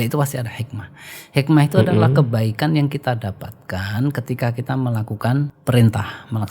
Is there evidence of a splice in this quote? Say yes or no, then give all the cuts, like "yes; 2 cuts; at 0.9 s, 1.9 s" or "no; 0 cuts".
yes; 1 cut; at 5.6 s